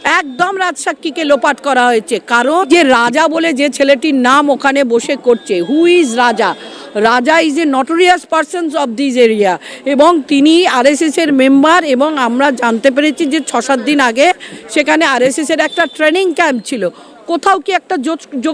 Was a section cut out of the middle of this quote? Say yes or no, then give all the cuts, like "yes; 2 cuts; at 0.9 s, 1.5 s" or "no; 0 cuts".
yes; 1 cut; at 2.7 s